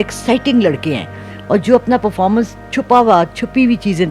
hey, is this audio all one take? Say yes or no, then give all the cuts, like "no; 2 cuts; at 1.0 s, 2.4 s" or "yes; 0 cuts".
yes; 0 cuts